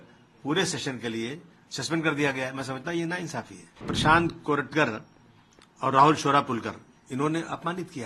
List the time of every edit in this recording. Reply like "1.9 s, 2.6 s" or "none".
3.9 s